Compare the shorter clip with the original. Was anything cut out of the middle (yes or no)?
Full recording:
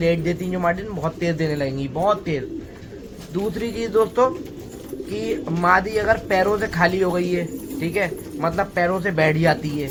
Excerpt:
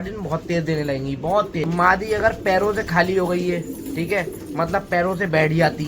yes